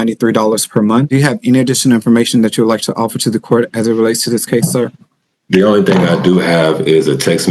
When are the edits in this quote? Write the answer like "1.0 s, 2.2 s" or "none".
1.1 s